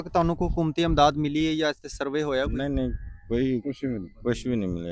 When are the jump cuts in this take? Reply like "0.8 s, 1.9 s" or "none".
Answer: none